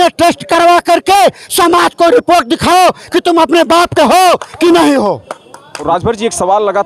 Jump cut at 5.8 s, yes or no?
yes